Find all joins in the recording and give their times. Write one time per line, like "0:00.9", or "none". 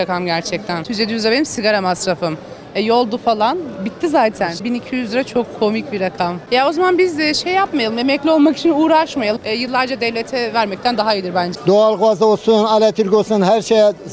0:00.9
0:04.6
0:06.4
0:09.4
0:11.5